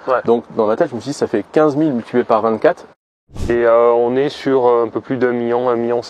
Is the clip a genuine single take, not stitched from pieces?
no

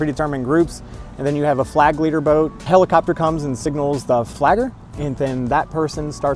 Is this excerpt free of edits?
no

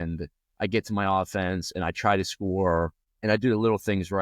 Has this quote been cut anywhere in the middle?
yes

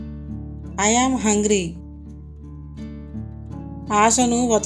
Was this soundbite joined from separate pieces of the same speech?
yes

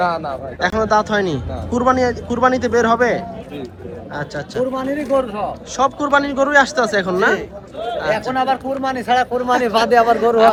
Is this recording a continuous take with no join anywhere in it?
yes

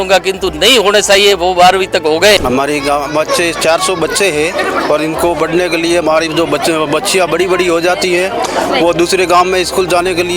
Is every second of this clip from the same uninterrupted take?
no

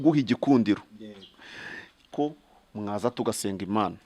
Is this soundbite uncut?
no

